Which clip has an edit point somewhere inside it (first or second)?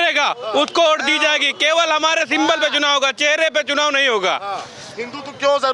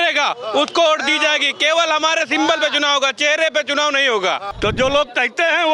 second